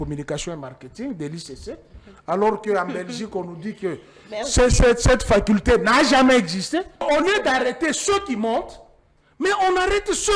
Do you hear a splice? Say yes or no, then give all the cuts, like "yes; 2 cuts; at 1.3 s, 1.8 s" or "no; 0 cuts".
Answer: yes; 1 cut; at 7.0 s